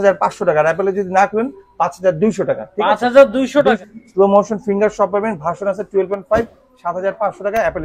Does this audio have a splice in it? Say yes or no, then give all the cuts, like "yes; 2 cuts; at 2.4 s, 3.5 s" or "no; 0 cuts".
yes; 1 cut; at 3.8 s